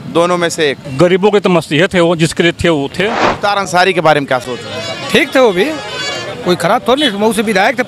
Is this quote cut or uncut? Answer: cut